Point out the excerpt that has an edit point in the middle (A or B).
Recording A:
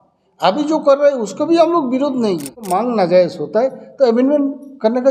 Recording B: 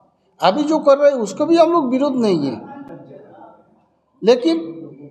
A